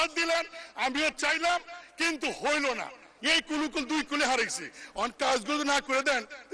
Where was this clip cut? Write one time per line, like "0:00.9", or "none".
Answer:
0:03.1